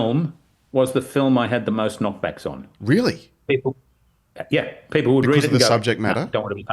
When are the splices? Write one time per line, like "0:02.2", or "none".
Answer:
none